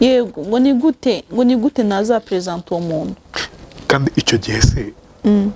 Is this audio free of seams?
yes; 0 cuts

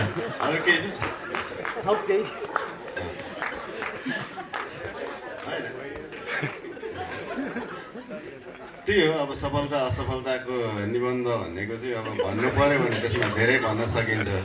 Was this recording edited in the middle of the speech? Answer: no; 0 cuts

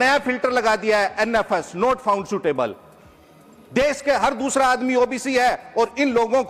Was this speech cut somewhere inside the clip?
no; 0 cuts

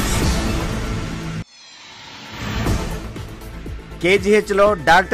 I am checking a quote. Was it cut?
yes; 2 cuts; at 1.1 s, 3.6 s

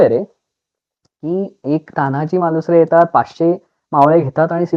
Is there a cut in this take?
no; 0 cuts

